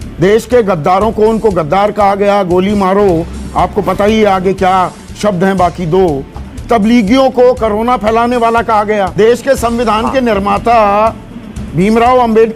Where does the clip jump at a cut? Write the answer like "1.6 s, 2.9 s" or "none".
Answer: 6.4 s, 9.1 s